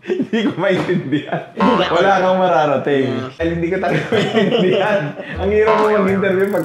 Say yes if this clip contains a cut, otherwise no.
yes